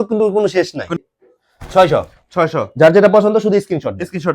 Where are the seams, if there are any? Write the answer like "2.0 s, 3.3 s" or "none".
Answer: 1.1 s